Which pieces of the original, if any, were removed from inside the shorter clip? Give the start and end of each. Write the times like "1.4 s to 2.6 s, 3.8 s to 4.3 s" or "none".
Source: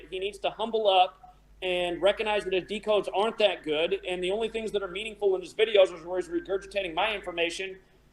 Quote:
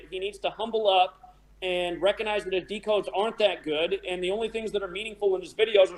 none